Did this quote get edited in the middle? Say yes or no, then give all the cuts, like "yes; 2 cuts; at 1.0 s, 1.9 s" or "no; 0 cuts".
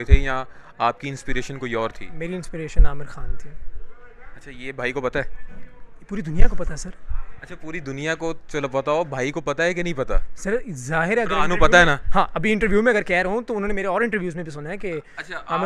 no; 0 cuts